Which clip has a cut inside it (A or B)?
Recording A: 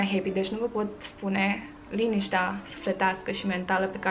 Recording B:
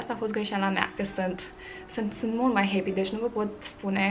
B